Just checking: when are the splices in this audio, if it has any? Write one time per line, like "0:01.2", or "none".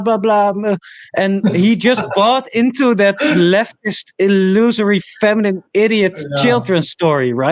none